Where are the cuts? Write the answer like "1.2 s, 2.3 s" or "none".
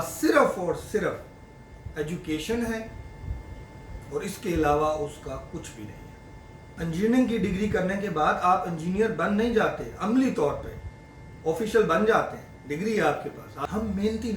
6.7 s, 13.5 s